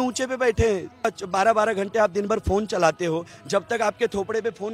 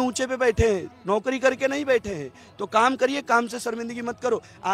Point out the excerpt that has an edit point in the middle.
first; 1 cut; at 1.1 s

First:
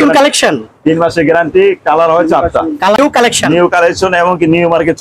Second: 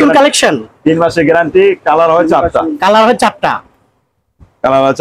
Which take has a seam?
first; 1 cut; at 3.0 s

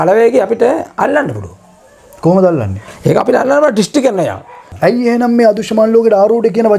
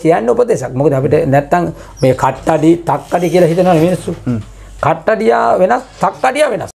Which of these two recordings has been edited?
first; 1 cut; at 4.6 s

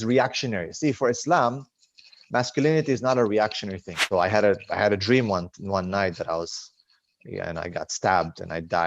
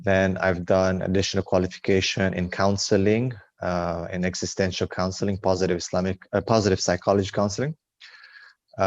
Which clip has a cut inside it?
first; 1 cut; at 3.9 s

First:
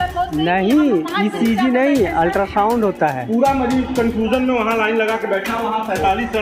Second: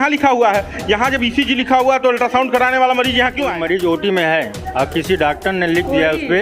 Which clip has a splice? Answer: second; 1 cut; at 3.5 s

